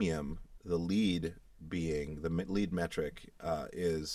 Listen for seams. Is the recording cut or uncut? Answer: uncut